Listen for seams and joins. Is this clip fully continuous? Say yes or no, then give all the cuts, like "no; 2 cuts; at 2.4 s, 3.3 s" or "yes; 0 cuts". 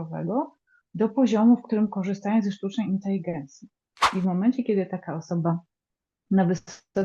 no; 1 cut; at 3.9 s